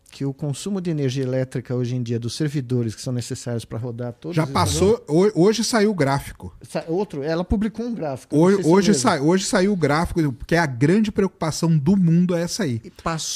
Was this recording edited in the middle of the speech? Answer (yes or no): no